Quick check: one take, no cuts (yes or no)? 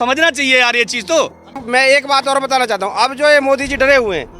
no